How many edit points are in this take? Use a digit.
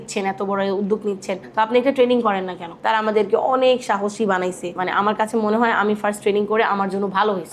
1